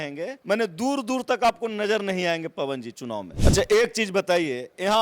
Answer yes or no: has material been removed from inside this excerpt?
yes